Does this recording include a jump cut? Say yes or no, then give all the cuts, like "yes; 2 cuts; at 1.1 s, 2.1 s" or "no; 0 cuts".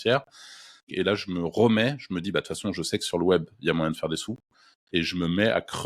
yes; 1 cut; at 0.9 s